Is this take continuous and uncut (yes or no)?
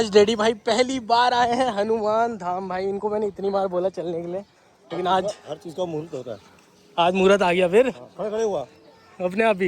yes